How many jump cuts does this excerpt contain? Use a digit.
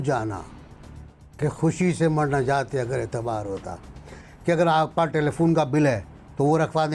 1